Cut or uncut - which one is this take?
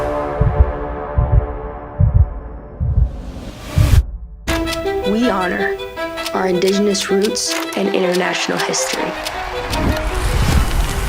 cut